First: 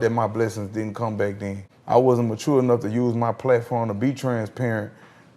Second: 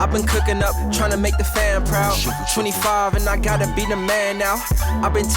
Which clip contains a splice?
first; 1 cut; at 1.7 s

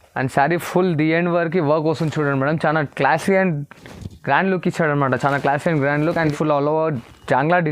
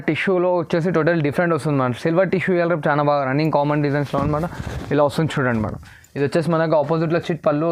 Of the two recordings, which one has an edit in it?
first; 1 cut; at 6.3 s

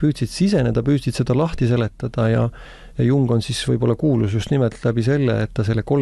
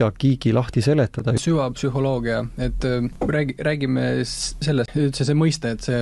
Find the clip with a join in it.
second; 3 cuts; at 1.4 s, 3.1 s, 4.9 s

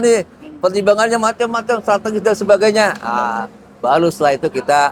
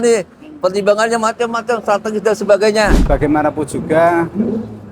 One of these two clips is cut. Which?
second; 1 cut; at 3.0 s

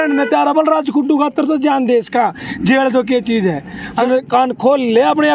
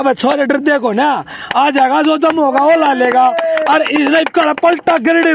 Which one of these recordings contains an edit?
first; 1 cut; at 4.0 s

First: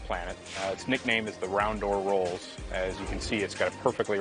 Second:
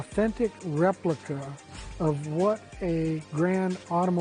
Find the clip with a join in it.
second; 1 cut; at 3.2 s

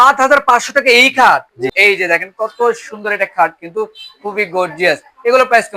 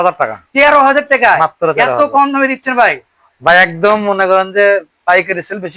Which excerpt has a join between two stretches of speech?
first; 1 cut; at 1.7 s

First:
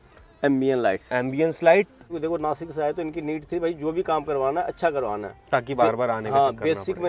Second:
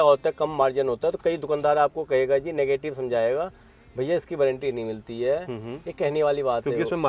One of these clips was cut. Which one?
first; 1 cut; at 2.0 s

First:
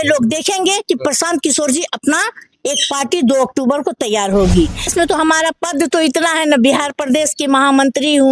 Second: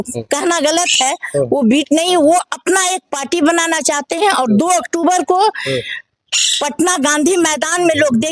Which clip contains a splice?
first; 1 cut; at 4.9 s

